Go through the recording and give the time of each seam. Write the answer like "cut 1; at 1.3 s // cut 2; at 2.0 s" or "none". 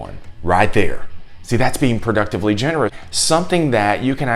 cut 1; at 3.0 s